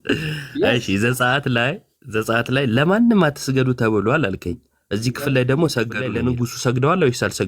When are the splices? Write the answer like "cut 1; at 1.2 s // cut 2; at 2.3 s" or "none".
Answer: cut 1; at 6.1 s